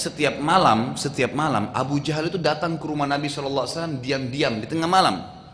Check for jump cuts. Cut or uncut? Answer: uncut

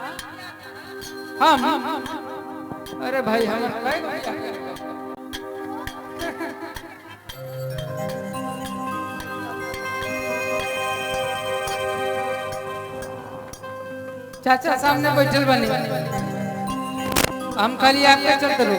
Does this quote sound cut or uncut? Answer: uncut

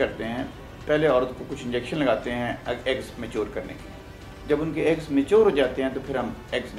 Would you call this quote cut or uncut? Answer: uncut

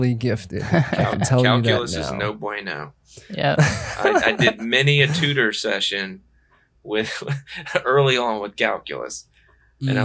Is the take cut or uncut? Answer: cut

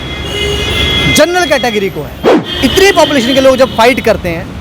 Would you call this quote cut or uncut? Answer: cut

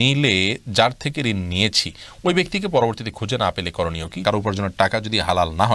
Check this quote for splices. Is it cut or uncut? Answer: cut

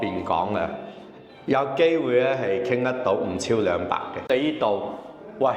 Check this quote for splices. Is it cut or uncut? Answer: cut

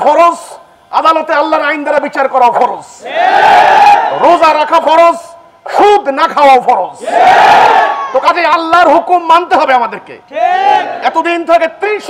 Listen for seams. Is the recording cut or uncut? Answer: uncut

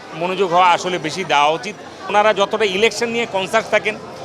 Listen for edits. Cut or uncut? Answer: cut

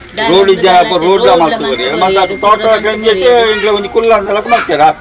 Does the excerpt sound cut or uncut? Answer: uncut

